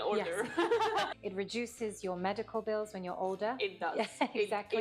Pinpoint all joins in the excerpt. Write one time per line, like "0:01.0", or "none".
0:01.2